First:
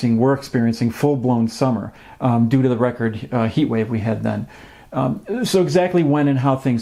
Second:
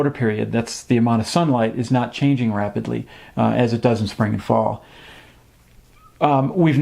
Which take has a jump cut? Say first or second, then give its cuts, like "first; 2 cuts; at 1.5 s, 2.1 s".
second; 1 cut; at 5.4 s